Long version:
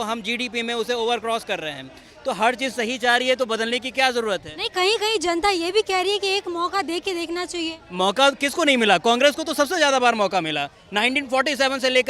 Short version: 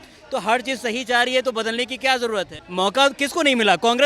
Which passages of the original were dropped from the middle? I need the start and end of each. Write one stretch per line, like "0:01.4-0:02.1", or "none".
0:04.5-0:07.8